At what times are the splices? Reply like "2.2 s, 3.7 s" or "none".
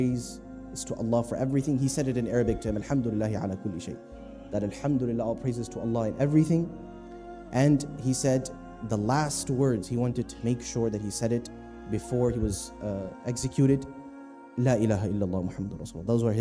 none